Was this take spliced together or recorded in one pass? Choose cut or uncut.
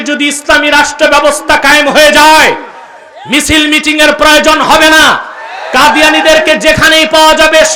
uncut